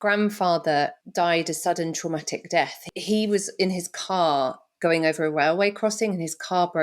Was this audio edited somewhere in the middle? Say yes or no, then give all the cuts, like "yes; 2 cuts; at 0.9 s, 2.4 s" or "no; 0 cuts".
yes; 2 cuts; at 1.0 s, 2.9 s